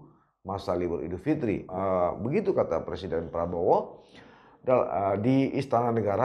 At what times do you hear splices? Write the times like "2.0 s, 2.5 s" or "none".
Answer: none